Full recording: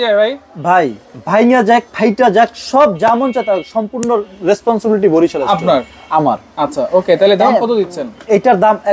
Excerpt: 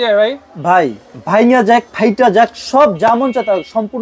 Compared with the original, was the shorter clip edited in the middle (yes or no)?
no